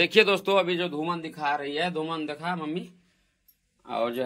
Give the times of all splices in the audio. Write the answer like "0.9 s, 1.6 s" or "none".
none